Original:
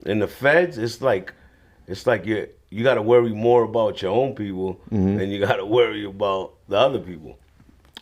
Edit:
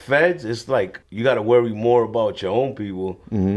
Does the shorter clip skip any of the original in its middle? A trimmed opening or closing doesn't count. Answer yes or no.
yes